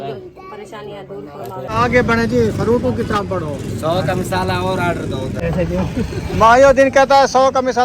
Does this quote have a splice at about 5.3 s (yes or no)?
yes